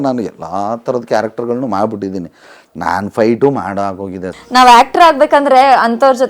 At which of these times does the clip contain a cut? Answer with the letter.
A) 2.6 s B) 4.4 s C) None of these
B